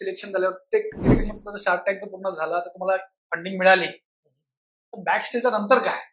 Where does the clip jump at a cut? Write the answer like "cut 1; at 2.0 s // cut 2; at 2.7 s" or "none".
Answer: cut 1; at 1.2 s